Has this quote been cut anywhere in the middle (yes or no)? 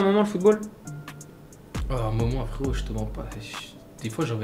no